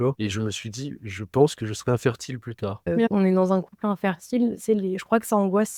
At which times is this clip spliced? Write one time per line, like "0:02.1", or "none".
0:03.0

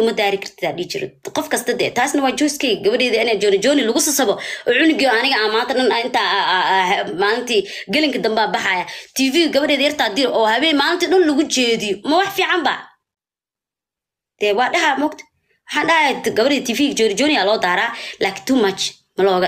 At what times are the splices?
none

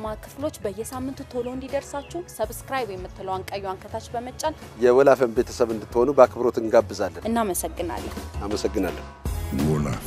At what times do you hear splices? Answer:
0:07.2

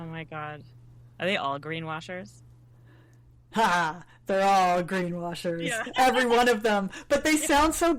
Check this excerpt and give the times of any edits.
none

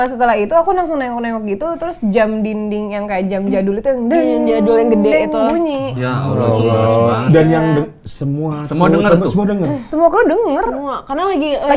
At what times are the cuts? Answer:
none

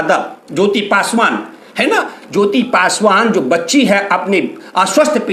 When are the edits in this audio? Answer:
none

